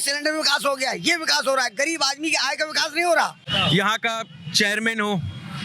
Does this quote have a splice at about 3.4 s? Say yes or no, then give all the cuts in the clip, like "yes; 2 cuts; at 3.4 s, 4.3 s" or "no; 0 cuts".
yes; 1 cut; at 3.4 s